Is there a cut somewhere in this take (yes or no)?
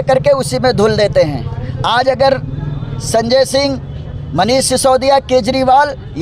no